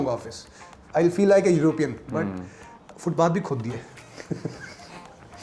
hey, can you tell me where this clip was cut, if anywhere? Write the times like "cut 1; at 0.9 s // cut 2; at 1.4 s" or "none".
none